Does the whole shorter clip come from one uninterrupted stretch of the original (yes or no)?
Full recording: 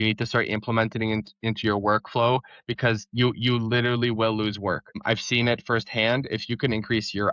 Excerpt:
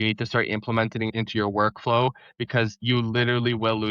no